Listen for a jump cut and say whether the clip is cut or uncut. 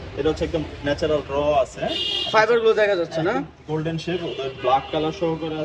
uncut